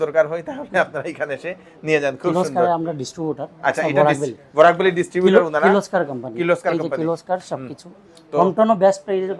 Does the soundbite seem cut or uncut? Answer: uncut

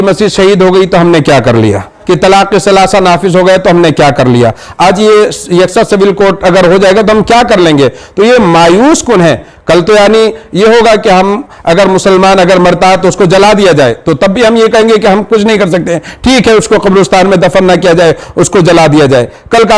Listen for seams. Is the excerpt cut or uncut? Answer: cut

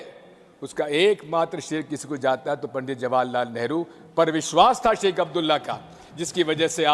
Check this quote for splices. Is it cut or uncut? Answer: uncut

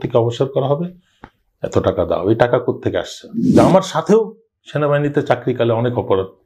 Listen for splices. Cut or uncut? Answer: cut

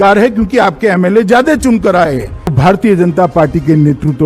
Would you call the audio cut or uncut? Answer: cut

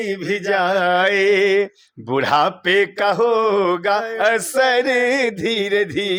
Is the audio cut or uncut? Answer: uncut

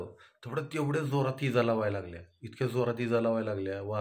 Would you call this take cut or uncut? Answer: uncut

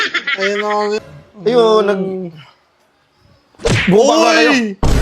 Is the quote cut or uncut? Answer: cut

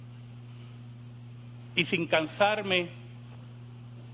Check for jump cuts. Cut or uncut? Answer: uncut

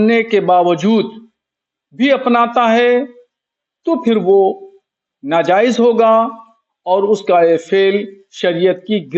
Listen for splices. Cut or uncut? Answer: uncut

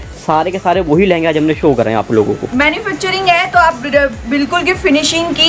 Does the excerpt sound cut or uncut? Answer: uncut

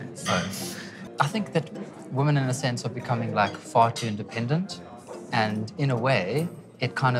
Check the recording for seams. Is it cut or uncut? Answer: cut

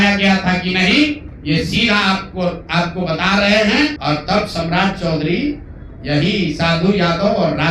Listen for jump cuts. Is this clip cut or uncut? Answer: cut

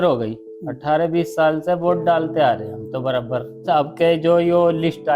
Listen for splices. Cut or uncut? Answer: cut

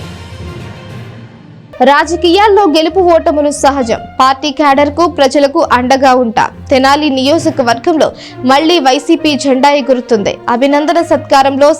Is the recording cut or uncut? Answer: cut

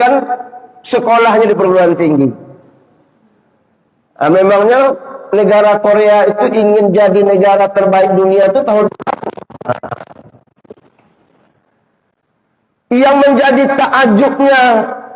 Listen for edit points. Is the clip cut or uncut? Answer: uncut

